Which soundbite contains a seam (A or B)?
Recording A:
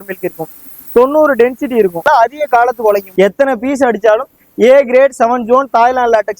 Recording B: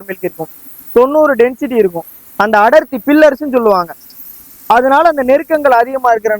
A